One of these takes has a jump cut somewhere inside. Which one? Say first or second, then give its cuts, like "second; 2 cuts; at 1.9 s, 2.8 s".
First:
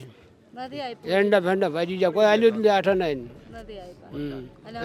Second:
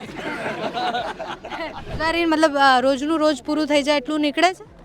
second; 1 cut; at 1.9 s